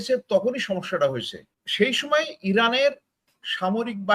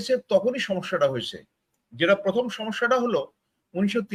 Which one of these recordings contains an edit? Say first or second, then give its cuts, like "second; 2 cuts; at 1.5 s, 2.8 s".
first; 1 cut; at 1.6 s